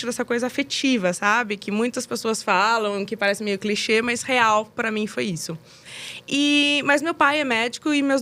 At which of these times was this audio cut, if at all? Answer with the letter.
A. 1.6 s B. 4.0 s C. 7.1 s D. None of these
D